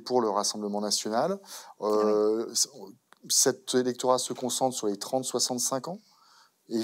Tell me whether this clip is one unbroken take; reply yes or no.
yes